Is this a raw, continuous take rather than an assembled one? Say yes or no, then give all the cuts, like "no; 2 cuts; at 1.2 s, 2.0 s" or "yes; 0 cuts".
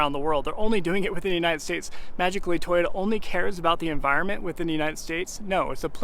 yes; 0 cuts